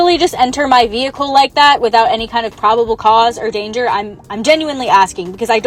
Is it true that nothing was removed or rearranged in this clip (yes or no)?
yes